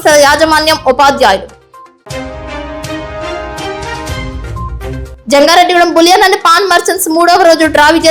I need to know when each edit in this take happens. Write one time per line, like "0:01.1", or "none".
none